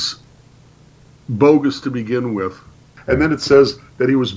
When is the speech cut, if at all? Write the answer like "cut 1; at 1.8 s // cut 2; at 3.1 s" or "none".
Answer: cut 1; at 2.9 s